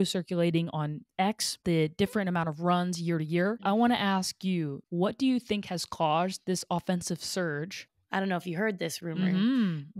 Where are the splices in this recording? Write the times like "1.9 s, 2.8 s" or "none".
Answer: 1.6 s, 3.6 s, 7.8 s